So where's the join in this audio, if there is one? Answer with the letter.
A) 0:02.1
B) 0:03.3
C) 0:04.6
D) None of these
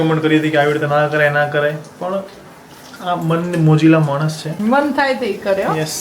C